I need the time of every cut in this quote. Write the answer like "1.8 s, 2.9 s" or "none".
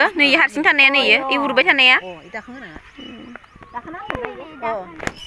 none